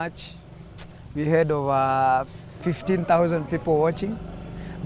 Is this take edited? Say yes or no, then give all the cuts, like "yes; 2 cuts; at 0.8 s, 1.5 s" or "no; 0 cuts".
no; 0 cuts